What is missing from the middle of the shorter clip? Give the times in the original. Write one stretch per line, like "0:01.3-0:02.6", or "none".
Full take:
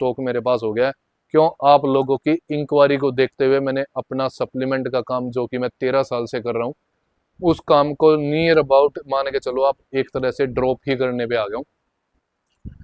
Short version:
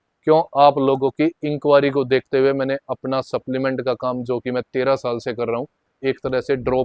0:07.0-0:09.8

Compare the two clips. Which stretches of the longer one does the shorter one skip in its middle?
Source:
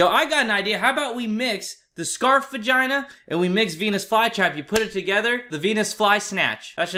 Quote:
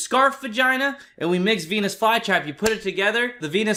none

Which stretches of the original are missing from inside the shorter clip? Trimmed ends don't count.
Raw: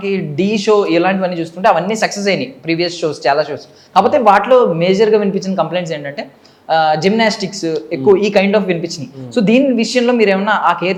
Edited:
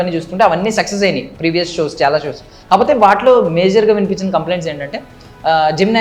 none

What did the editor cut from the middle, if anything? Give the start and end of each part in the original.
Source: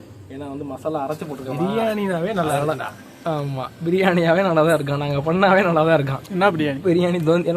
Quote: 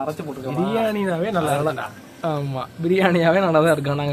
none

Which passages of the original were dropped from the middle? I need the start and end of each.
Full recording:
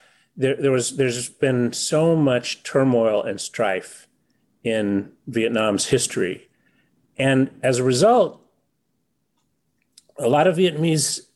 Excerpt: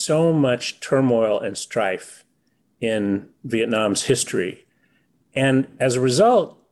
none

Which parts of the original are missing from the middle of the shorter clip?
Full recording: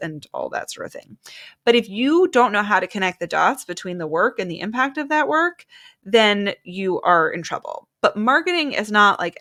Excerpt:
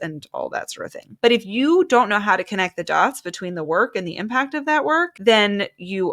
0:01.0-0:01.5
0:05.6-0:06.0

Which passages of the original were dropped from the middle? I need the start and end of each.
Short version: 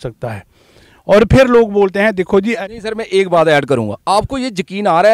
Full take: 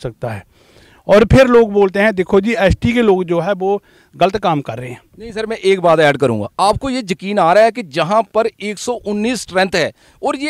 0:02.6-0:05.1

